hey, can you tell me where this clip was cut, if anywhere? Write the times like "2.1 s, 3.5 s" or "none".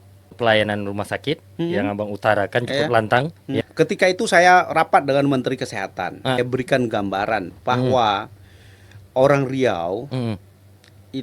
3.6 s, 6.4 s